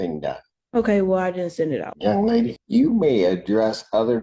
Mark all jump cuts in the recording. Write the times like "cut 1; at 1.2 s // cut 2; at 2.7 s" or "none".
cut 1; at 1.9 s // cut 2; at 2.6 s